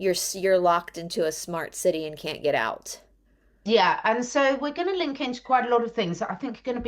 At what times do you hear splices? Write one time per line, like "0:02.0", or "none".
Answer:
none